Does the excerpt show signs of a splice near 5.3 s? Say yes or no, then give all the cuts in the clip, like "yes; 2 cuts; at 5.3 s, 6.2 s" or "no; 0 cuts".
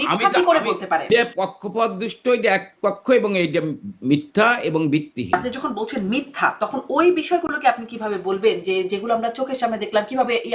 yes; 2 cuts; at 1.1 s, 5.3 s